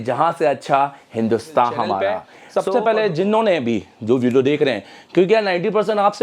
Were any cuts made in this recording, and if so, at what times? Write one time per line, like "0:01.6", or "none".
0:02.2